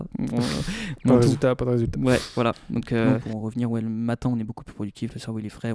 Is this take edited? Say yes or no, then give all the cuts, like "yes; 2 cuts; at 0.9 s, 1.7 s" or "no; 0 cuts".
yes; 1 cut; at 3.0 s